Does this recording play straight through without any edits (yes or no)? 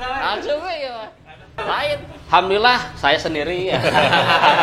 no